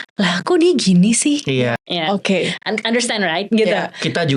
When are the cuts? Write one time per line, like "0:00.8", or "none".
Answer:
0:01.8